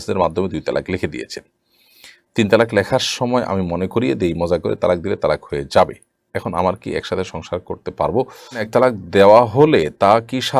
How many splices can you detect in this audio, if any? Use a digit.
1